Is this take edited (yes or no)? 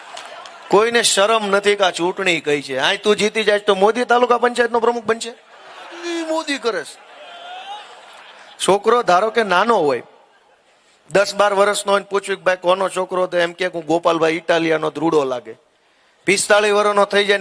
yes